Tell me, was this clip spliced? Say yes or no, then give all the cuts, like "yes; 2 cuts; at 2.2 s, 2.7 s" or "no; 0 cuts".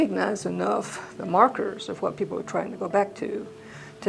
no; 0 cuts